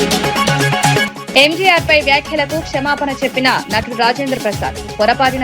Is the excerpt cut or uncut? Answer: cut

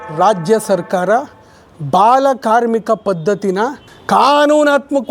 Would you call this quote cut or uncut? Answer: cut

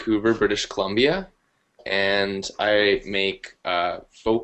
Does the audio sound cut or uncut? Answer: cut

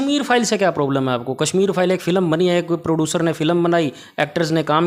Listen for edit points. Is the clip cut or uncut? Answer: uncut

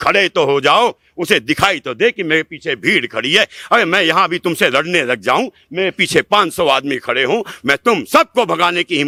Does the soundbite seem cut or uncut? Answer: uncut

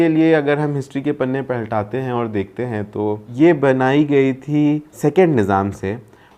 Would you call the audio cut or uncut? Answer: cut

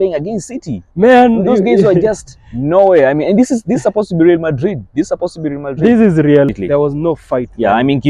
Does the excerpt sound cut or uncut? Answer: cut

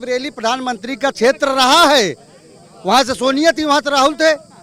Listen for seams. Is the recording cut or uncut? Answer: uncut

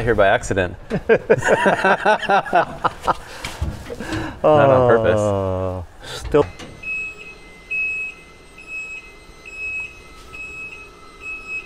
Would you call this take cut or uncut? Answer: cut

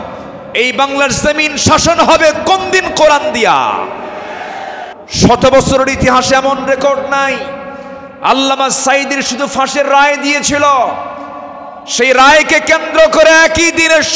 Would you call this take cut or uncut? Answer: cut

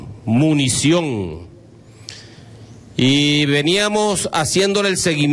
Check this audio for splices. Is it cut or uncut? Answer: uncut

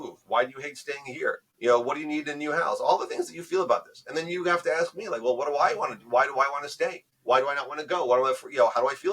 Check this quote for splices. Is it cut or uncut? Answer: cut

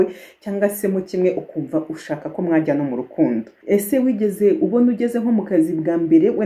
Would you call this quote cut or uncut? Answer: cut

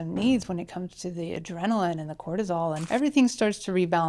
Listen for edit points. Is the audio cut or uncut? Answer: cut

